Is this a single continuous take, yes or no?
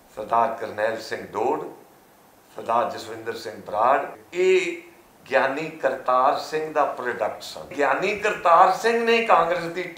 no